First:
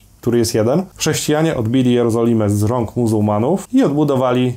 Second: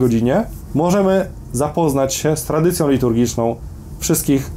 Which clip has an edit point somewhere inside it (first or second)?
first